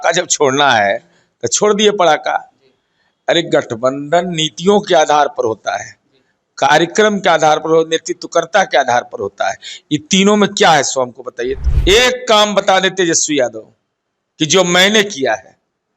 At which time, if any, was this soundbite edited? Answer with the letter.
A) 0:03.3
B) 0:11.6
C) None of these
B